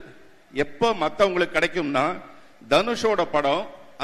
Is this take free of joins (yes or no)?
yes